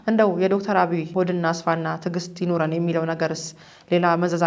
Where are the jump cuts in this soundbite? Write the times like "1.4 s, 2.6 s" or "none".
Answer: 1.1 s